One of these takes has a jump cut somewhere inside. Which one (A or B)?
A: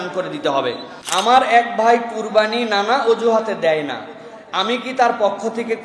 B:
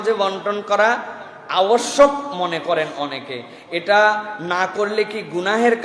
A